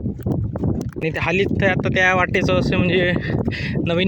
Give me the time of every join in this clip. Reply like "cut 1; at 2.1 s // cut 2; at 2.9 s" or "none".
cut 1; at 1.0 s

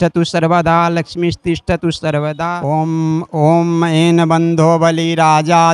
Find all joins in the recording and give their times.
cut 1; at 2.6 s

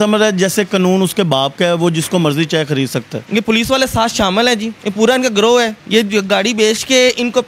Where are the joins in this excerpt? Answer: cut 1; at 3.1 s // cut 2; at 4.8 s // cut 3; at 5.8 s

